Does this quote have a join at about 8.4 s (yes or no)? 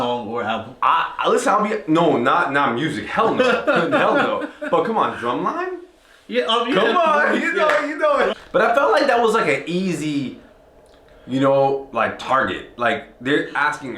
yes